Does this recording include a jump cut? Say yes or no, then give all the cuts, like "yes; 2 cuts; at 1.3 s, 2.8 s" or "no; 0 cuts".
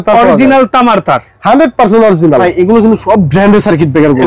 yes; 1 cut; at 2.4 s